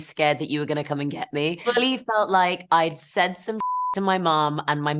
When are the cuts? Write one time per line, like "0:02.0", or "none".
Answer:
0:01.6

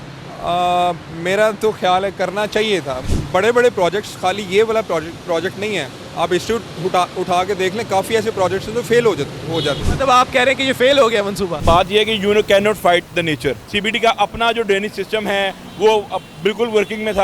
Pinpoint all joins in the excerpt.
0:03.1
0:09.9
0:11.6
0:13.7

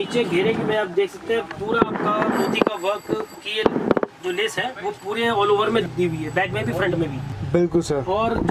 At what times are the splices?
none

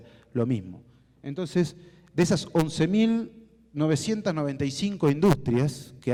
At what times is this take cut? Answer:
none

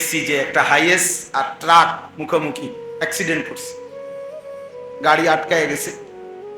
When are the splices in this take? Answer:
0:03.4
0:05.0

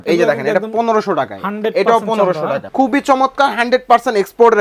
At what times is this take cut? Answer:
0:02.6

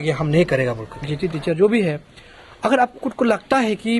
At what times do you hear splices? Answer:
0:01.1

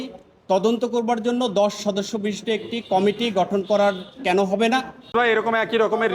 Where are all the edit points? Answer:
0:05.1

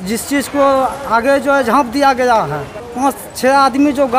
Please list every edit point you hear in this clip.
0:02.8

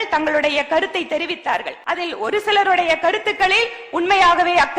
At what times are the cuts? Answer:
0:01.7

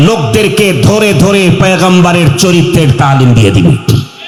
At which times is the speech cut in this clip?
none

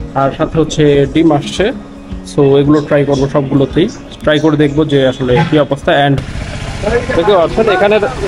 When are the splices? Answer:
0:06.3

